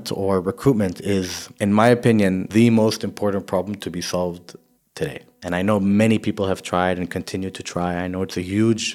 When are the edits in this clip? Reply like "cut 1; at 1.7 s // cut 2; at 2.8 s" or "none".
cut 1; at 1.4 s // cut 2; at 2.4 s // cut 3; at 4.9 s